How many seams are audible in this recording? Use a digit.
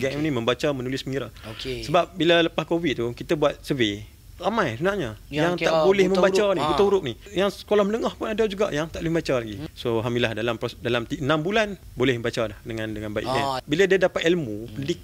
4